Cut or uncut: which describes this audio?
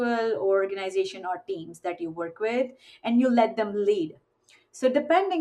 uncut